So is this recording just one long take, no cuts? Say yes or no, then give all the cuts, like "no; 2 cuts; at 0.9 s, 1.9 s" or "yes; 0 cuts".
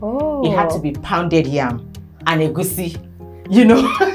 yes; 0 cuts